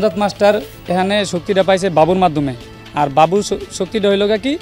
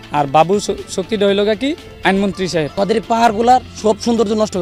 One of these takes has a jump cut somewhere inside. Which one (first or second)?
second